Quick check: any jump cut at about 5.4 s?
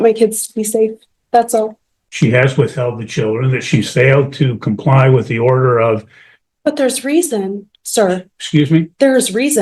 no; 1 cut; at 1.8 s

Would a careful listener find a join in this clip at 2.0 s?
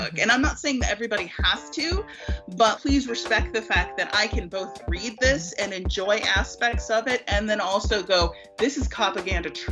no; 0 cuts

